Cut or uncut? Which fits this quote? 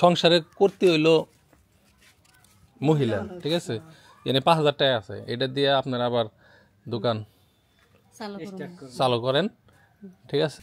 uncut